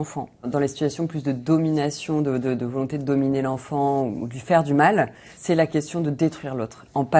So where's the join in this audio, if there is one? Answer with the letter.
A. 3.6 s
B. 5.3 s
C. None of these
B